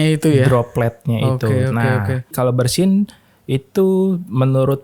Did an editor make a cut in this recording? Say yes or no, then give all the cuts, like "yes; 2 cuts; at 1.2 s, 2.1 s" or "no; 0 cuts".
yes; 1 cut; at 2.3 s